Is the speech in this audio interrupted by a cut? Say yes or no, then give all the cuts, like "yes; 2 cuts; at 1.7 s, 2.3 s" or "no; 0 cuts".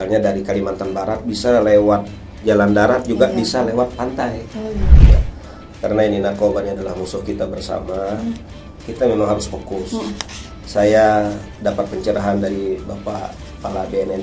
yes; 1 cut; at 5.0 s